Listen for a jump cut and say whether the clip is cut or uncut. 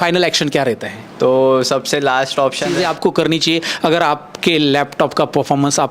cut